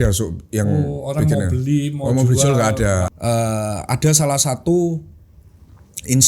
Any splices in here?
yes; 1 cut; at 3.1 s

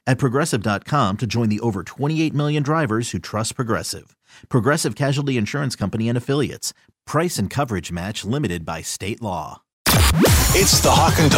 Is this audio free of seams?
no; 1 cut; at 9.8 s

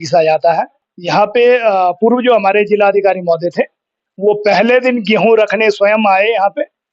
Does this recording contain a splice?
yes; 1 cut; at 1.0 s

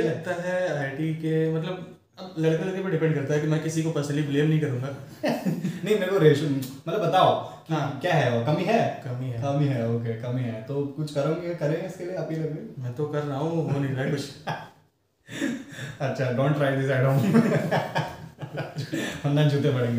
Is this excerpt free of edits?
yes; 0 cuts

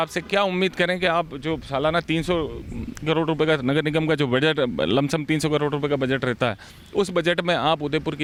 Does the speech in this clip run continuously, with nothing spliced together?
yes; 0 cuts

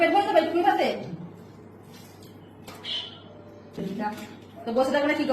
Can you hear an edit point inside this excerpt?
yes; 1 cut; at 3.8 s

